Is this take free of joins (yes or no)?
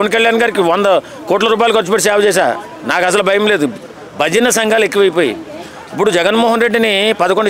yes